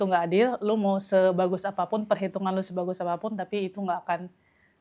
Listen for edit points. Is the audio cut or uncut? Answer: uncut